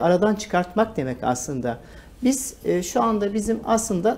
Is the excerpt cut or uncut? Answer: uncut